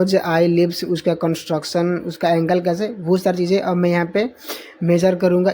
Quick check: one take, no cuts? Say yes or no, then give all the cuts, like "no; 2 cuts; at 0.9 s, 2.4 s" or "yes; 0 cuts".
yes; 0 cuts